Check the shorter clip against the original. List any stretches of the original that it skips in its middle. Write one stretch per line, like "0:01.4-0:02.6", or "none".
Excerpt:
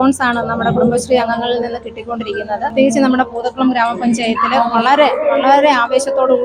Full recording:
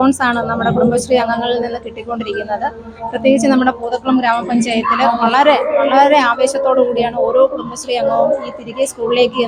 0:02.7-0:03.2